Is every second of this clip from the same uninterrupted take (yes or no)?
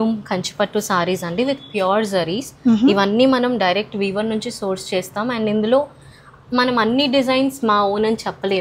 yes